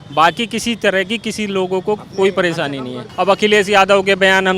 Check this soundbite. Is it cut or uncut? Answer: cut